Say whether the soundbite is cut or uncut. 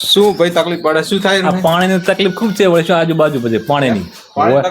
uncut